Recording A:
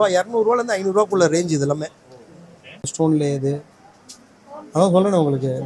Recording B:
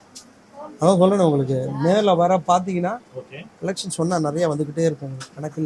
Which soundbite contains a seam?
A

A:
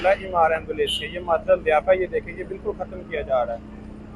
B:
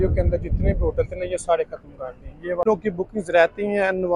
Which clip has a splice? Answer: B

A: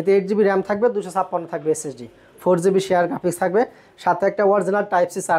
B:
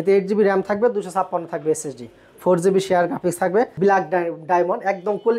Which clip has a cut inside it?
B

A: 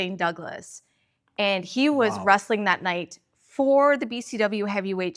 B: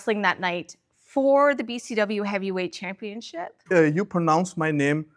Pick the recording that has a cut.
B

